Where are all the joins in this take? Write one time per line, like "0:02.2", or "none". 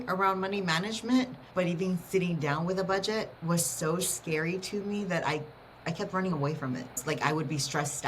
0:01.4
0:03.3
0:07.0